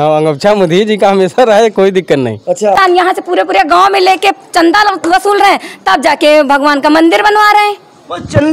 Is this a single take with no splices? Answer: no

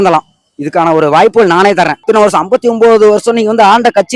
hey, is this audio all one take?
no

